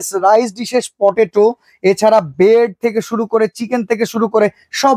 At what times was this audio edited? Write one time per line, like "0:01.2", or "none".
none